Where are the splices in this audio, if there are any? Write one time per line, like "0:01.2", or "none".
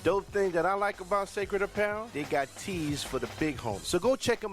none